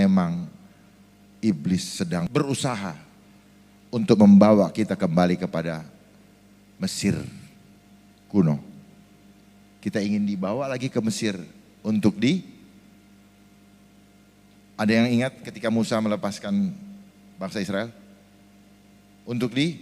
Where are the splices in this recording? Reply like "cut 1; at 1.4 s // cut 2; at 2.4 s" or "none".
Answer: cut 1; at 2.3 s